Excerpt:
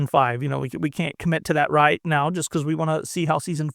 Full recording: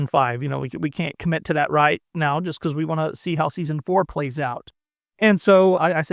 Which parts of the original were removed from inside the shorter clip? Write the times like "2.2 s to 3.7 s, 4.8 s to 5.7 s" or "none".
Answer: 2.0 s to 2.1 s